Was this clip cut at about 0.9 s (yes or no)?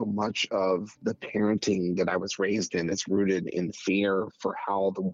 yes